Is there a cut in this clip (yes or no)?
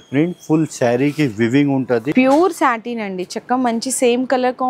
yes